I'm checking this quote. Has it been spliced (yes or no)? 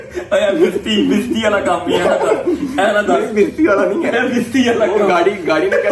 no